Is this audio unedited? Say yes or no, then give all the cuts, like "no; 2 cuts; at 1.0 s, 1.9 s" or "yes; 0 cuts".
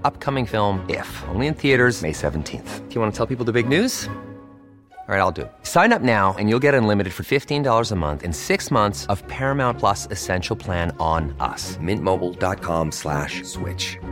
yes; 0 cuts